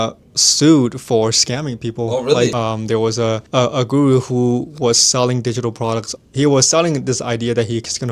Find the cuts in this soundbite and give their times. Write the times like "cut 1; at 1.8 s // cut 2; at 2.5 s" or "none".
cut 1; at 2.5 s // cut 2; at 3.4 s // cut 3; at 6.1 s